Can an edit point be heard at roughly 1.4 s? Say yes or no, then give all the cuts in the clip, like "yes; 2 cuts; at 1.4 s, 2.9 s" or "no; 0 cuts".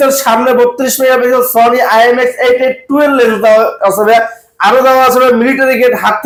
no; 0 cuts